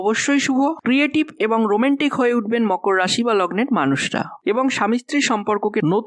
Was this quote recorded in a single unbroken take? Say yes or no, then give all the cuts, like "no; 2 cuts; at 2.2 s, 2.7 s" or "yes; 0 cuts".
yes; 0 cuts